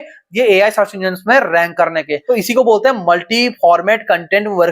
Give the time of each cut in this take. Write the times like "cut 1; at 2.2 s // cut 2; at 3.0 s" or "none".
cut 1; at 2.1 s